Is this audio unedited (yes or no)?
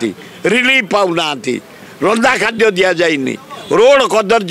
yes